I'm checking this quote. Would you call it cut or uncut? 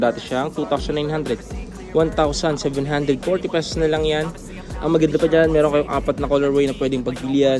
uncut